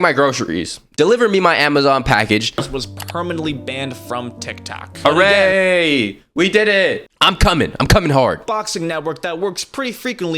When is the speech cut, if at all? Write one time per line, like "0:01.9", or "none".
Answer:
0:00.9
0:02.6
0:07.0
0:08.9